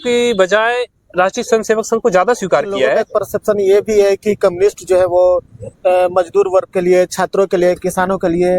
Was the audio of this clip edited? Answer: yes; 1 cut; at 3.0 s

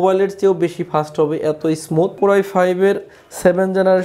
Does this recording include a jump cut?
yes; 1 cut; at 2.1 s

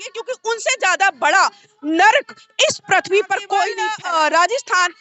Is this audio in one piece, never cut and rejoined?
no; 1 cut; at 3.9 s

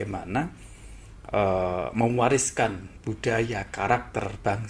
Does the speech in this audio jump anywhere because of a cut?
no; 0 cuts

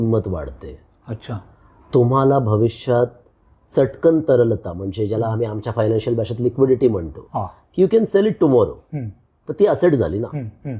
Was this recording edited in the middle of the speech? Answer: no; 0 cuts

